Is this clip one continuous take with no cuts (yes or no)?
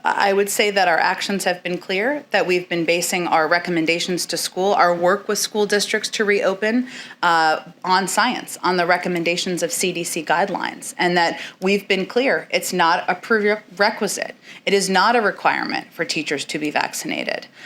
yes